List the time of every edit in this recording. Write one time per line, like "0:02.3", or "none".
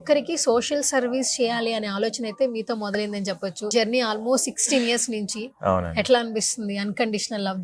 0:03.7